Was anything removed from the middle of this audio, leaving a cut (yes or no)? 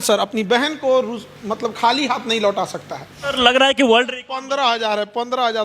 yes